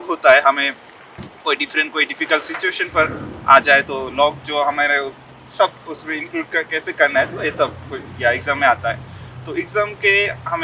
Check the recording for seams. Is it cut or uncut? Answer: uncut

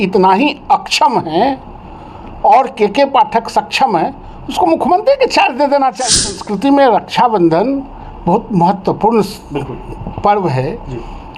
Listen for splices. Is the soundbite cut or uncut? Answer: cut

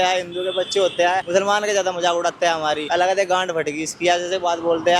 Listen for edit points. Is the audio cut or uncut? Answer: cut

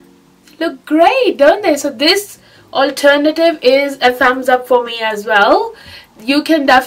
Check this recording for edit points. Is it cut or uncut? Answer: uncut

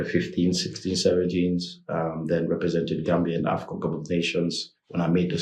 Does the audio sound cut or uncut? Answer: uncut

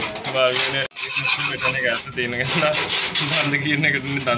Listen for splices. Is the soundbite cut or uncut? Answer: uncut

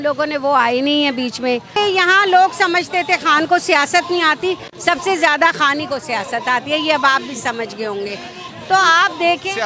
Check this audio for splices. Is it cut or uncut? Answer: cut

